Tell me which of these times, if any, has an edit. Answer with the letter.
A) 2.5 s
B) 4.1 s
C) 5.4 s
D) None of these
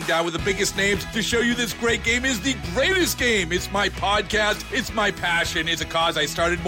D